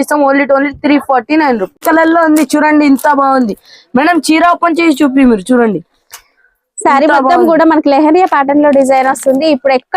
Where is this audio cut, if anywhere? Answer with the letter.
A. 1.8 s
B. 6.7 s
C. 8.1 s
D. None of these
A